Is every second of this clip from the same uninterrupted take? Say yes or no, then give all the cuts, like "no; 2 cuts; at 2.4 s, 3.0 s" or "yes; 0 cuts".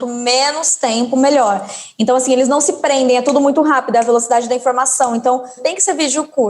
no; 1 cut; at 5.6 s